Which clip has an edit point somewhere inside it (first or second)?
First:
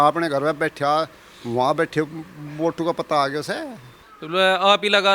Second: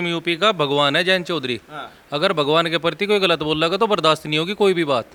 first